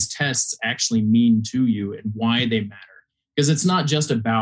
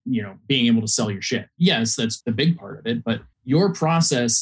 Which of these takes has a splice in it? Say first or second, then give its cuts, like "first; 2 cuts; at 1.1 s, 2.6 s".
second; 3 cuts; at 1.5 s, 2.2 s, 3.3 s